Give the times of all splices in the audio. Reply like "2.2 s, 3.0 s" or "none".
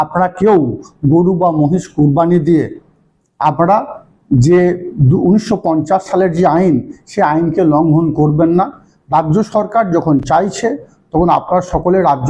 none